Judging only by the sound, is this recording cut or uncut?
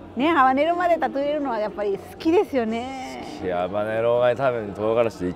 uncut